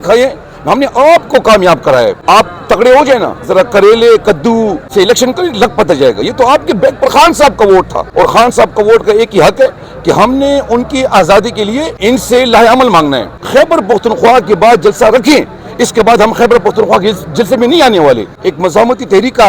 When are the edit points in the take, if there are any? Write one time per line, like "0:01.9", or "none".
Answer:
0:02.2
0:04.8
0:08.0
0:11.9
0:13.3
0:18.4

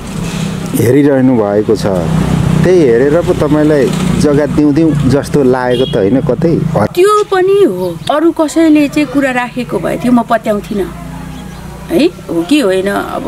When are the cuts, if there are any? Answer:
0:06.9
0:08.0

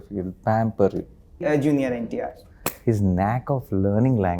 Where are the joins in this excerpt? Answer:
0:01.4

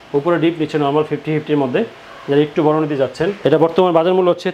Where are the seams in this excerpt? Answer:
none

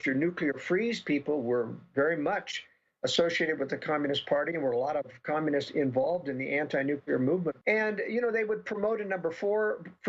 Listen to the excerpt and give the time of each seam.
0:07.6

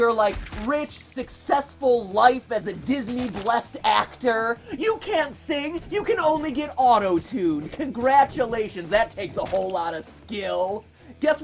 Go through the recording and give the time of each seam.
none

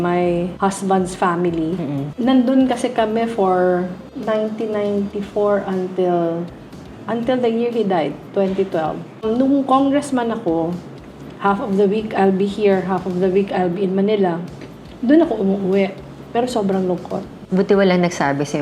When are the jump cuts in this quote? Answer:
0:09.1
0:17.3

